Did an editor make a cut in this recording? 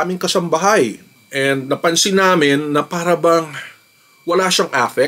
no; 0 cuts

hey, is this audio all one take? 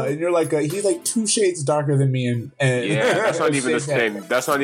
yes; 0 cuts

